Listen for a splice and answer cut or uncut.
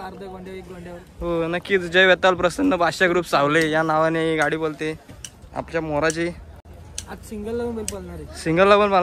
uncut